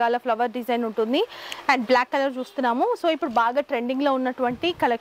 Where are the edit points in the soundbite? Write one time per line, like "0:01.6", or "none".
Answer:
none